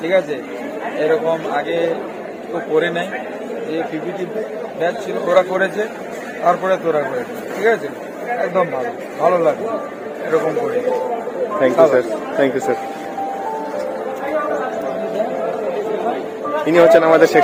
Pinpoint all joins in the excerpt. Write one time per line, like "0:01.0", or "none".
none